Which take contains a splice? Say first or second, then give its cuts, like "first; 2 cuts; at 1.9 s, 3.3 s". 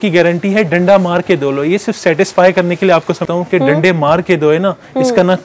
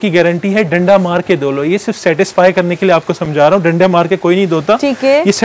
first; 1 cut; at 3.3 s